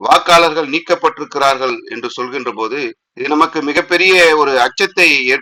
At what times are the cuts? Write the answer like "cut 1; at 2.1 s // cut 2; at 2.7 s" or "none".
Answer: none